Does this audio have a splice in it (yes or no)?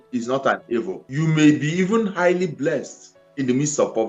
yes